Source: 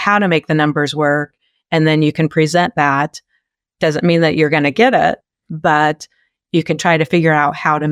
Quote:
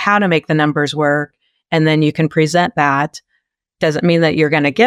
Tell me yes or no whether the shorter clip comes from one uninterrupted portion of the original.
yes